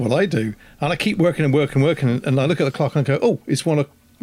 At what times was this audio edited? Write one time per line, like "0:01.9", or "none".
none